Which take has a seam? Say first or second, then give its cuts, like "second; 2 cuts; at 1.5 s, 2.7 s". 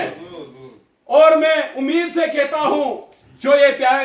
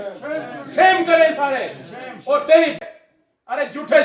second; 1 cut; at 2.8 s